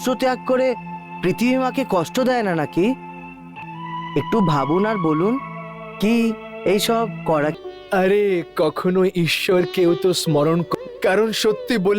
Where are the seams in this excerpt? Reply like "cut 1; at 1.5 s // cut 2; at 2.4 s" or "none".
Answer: cut 1; at 3.6 s // cut 2; at 7.5 s // cut 3; at 10.7 s